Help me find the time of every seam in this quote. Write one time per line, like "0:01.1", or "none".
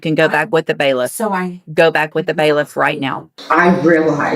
0:03.3

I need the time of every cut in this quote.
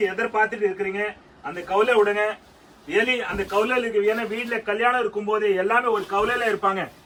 none

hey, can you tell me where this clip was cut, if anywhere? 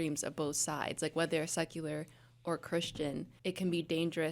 0:03.3

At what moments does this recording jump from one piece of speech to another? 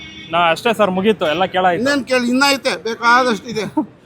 none

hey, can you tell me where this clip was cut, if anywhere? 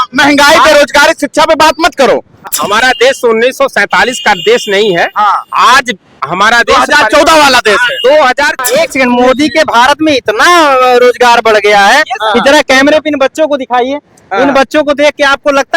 0:02.6
0:08.6

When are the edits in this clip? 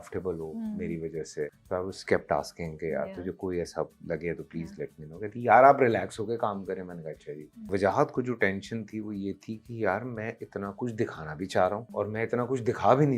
0:01.6
0:07.6
0:11.9

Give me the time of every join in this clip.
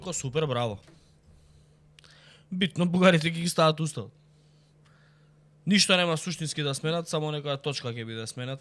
none

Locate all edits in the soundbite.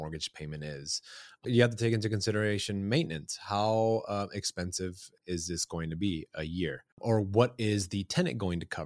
0:01.5
0:05.1
0:06.9

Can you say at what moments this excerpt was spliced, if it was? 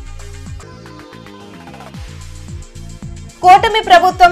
none

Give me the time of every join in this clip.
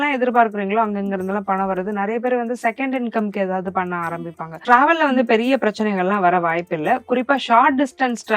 0:04.6

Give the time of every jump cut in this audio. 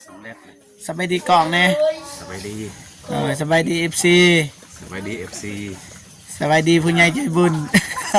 none

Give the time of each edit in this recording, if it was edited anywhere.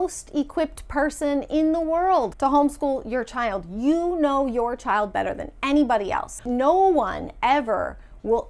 0:02.3
0:06.3

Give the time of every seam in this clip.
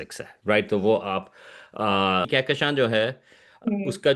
0:02.3

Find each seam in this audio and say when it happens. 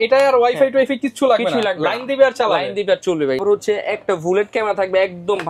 0:03.4

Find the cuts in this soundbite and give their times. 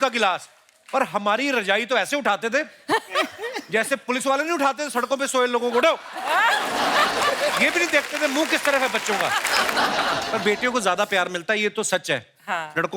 0:09.4

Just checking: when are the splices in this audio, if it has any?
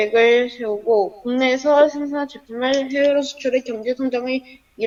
none

